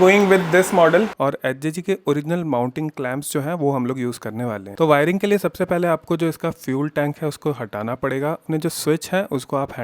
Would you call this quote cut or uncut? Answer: cut